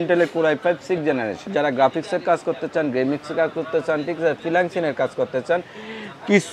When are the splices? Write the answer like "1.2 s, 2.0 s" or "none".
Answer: 1.4 s